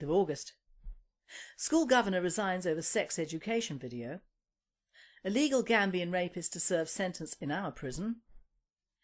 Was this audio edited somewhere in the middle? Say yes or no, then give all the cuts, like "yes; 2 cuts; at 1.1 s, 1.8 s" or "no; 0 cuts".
yes; 1 cut; at 7.8 s